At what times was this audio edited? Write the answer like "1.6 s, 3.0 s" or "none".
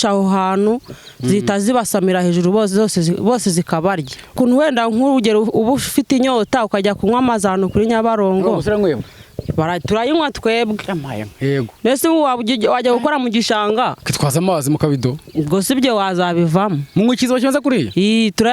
4.3 s